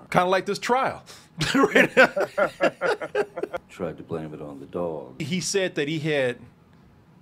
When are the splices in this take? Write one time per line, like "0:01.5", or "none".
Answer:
0:03.6
0:05.2